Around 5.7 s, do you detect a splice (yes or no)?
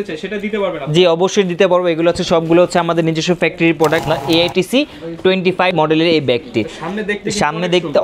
yes